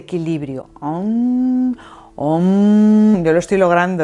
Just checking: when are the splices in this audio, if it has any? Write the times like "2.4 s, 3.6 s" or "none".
3.1 s